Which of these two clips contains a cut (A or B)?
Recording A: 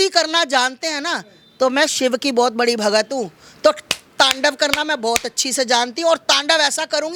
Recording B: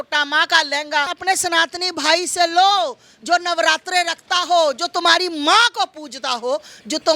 B